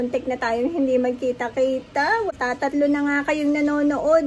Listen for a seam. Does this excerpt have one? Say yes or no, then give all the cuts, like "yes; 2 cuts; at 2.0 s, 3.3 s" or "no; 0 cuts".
yes; 1 cut; at 2.3 s